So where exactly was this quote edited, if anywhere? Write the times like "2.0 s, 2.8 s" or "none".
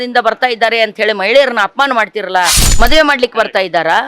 2.6 s